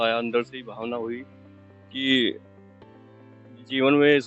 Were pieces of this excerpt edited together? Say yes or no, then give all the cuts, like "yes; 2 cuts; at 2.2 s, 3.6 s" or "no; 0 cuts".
no; 0 cuts